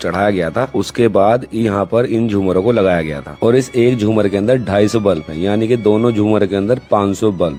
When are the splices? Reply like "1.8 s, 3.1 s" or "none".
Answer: none